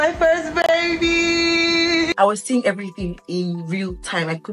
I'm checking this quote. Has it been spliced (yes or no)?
yes